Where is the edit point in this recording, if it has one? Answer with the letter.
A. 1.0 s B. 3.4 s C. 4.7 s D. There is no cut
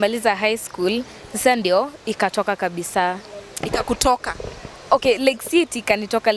D